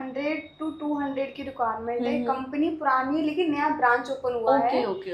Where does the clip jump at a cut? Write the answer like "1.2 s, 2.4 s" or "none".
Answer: none